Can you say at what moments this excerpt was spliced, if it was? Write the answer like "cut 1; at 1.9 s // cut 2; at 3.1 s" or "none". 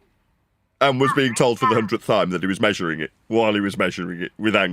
none